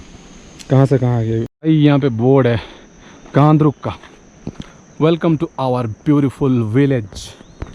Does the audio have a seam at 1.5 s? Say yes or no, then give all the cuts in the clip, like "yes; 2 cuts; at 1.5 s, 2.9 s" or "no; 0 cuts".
yes; 1 cut; at 1.5 s